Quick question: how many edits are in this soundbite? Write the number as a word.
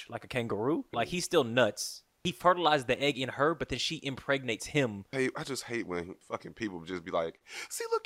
four